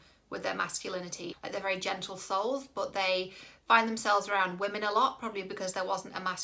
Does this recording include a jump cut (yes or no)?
yes